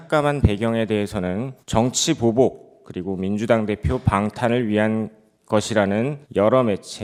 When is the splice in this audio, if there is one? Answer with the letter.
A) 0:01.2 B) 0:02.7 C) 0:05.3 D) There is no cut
D